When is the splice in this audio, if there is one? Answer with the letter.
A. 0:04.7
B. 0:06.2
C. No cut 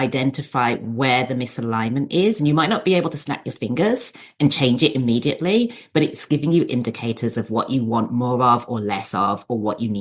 B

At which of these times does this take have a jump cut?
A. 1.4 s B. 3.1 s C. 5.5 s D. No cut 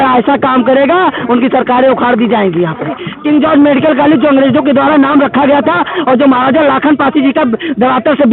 B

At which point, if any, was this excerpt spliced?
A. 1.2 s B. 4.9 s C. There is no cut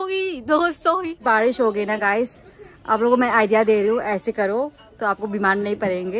A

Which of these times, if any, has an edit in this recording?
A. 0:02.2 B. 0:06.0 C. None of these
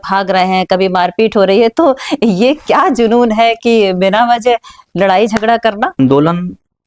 B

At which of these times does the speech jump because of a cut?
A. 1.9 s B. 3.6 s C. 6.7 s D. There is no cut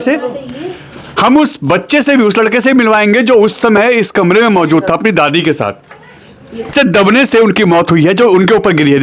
C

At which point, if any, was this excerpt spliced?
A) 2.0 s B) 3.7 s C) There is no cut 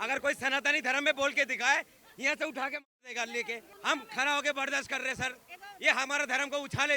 B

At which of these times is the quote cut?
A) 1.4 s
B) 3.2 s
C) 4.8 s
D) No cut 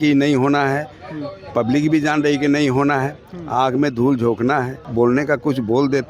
C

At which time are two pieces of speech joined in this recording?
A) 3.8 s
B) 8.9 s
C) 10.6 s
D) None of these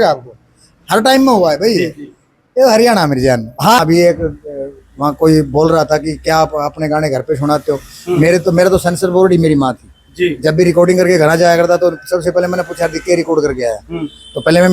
A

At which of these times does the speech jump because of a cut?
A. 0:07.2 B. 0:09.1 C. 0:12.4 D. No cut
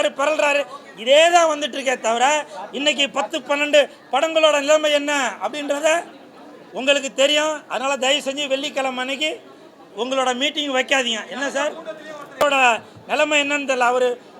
C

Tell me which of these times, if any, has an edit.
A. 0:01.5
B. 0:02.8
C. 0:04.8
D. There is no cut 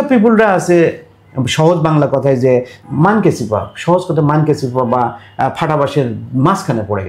B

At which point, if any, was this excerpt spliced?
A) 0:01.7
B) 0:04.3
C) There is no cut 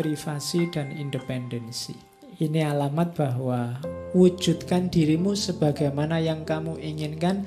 A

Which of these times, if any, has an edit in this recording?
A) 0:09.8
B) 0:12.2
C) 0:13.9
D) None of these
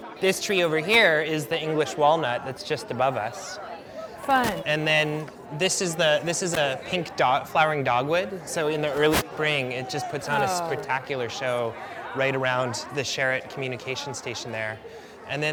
D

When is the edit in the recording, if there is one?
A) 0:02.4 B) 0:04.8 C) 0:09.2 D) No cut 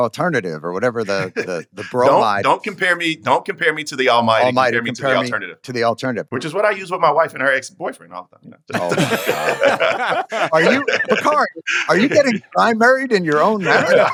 D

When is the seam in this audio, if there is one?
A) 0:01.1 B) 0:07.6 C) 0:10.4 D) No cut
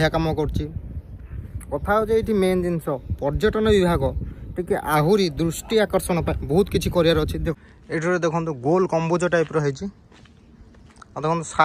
B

